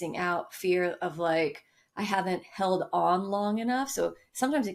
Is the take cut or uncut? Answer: uncut